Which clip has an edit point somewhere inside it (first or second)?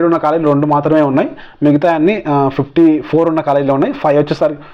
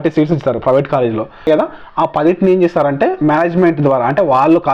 second